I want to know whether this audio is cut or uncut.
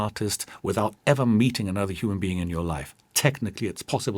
uncut